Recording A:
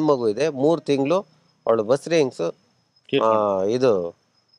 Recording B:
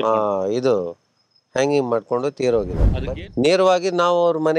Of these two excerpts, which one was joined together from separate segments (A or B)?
B